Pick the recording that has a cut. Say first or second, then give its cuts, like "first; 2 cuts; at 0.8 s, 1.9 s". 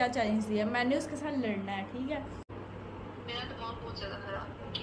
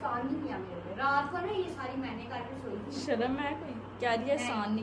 first; 1 cut; at 2.5 s